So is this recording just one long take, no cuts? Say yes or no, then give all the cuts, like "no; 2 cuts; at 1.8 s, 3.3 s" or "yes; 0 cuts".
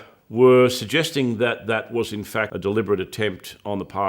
no; 1 cut; at 2.5 s